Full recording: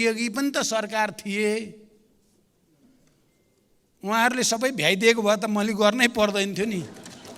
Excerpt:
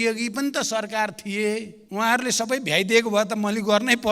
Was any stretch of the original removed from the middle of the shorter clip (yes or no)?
yes